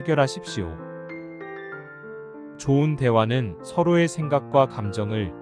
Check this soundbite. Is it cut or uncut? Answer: uncut